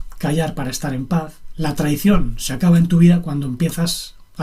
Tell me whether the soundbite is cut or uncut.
cut